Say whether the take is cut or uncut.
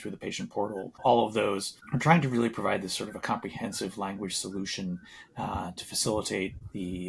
uncut